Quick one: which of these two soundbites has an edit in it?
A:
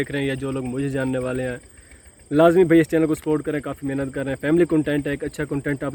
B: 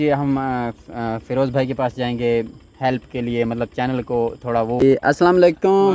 B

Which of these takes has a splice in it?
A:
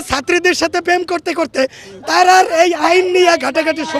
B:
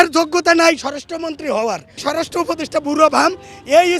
B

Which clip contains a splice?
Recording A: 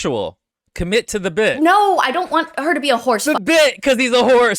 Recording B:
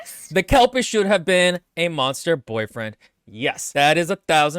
B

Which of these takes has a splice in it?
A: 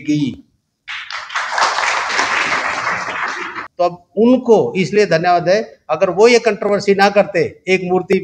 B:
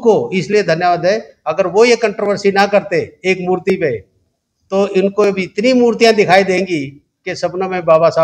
A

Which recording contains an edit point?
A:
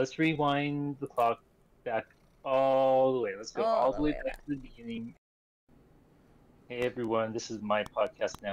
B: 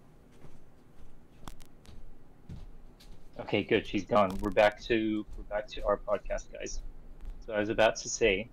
A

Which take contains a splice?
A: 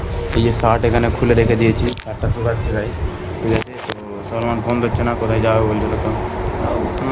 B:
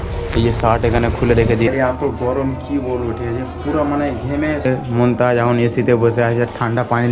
B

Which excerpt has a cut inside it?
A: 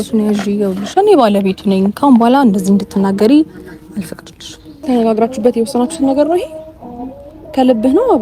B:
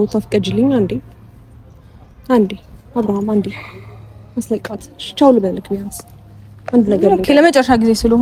A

